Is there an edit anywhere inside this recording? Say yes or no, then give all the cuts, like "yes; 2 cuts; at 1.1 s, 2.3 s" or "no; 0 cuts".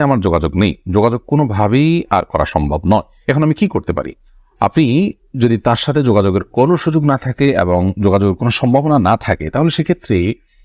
no; 0 cuts